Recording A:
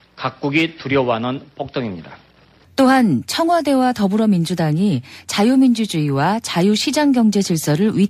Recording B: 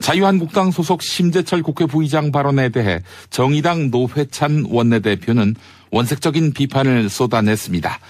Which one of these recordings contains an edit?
A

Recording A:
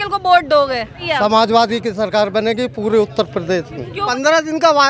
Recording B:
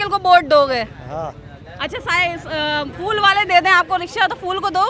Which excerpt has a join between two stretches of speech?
A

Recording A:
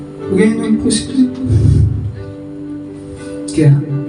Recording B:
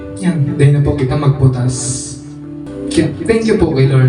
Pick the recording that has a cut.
B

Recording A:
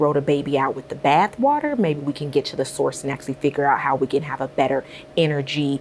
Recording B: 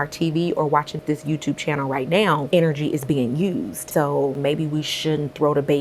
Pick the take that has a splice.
B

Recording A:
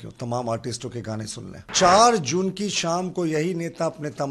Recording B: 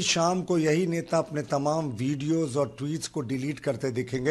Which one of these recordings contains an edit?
A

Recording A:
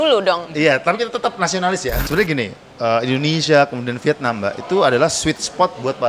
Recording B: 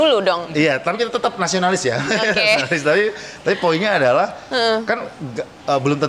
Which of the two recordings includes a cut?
A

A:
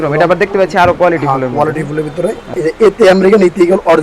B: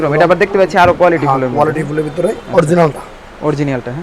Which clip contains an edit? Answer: A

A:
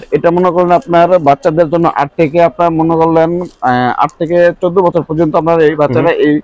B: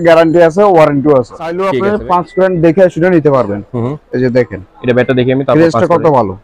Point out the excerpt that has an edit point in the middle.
B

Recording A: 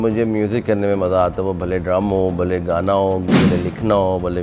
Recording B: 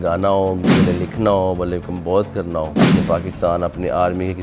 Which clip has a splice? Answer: B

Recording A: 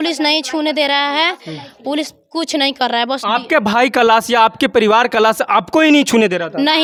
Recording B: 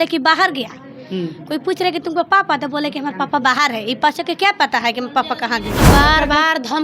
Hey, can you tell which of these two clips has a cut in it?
B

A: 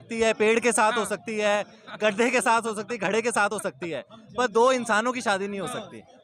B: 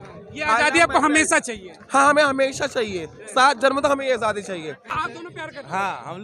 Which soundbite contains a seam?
B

